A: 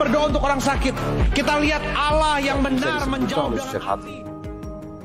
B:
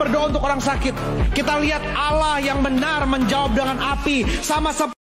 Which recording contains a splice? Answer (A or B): A